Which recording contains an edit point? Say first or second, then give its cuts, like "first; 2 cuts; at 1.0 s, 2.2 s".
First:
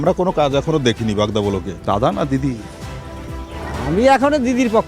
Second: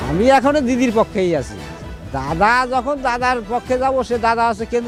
first; 1 cut; at 1.7 s